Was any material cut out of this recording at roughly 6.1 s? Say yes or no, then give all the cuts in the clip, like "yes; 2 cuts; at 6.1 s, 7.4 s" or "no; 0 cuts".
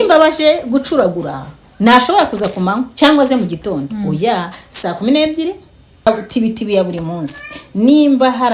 yes; 1 cut; at 6.1 s